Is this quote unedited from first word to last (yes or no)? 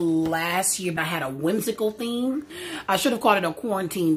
yes